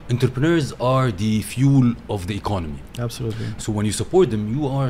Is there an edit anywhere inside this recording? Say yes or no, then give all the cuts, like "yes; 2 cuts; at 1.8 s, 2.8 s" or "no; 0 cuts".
no; 0 cuts